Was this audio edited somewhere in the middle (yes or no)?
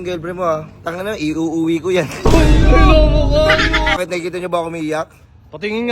yes